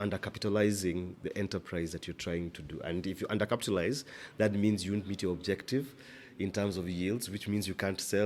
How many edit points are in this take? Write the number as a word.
zero